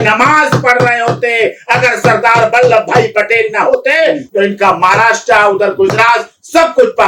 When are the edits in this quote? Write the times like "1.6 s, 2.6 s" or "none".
none